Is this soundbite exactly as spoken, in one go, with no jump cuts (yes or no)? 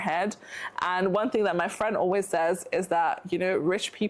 yes